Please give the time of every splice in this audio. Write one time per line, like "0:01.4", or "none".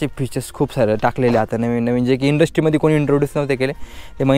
none